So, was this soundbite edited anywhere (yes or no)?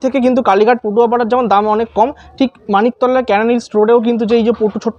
no